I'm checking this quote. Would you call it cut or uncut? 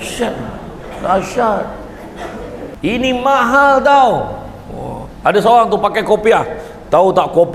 cut